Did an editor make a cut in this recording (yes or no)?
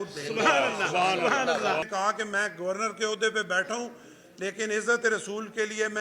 yes